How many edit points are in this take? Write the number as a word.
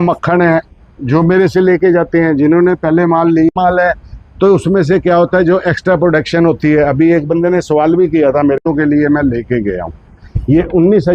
two